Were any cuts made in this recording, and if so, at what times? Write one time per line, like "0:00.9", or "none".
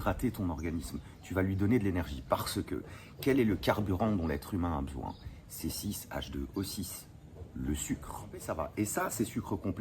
0:08.5